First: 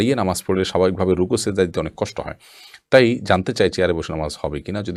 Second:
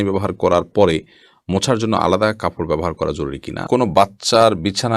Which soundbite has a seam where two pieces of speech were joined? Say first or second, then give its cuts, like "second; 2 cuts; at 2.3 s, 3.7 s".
second; 1 cut; at 3.6 s